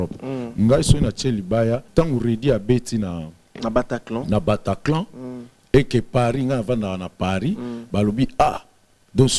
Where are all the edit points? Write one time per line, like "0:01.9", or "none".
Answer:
0:01.9